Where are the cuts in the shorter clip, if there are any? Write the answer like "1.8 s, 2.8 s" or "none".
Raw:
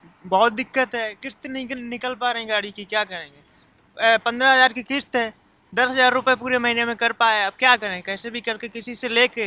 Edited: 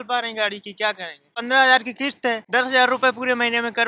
1.4 s, 2.4 s